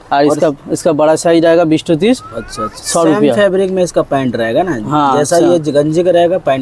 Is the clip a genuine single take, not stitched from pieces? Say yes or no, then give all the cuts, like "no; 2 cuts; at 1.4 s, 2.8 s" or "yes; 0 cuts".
yes; 0 cuts